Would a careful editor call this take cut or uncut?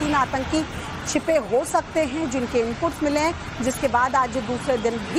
uncut